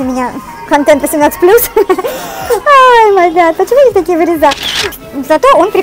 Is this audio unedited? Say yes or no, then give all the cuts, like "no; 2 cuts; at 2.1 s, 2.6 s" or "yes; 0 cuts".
no; 1 cut; at 4.9 s